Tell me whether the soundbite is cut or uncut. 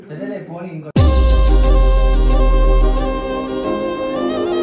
uncut